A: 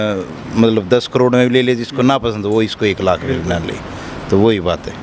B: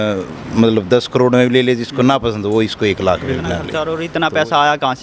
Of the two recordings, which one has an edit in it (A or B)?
B